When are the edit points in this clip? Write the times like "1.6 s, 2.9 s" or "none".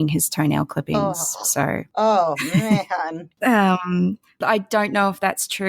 1.9 s, 3.3 s, 4.3 s